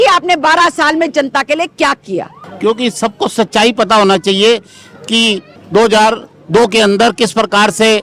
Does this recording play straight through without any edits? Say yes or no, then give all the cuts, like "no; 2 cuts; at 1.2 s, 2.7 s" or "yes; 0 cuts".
no; 1 cut; at 2.4 s